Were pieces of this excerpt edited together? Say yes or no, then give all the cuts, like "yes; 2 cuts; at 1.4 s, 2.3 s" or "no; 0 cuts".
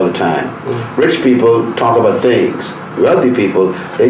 no; 0 cuts